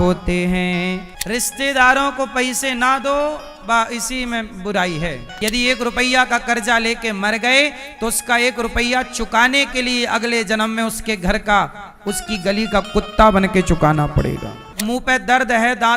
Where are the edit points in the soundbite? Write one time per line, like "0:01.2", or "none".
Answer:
0:01.1
0:05.3
0:14.7